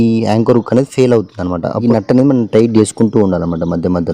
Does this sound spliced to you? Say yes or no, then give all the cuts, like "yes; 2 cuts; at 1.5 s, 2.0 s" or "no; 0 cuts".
yes; 1 cut; at 1.8 s